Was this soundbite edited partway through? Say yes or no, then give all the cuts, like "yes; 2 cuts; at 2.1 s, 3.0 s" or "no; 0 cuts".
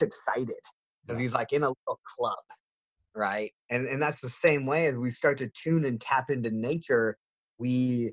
yes; 1 cut; at 3.6 s